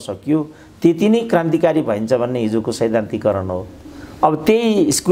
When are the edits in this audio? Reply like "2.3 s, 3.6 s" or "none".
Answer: none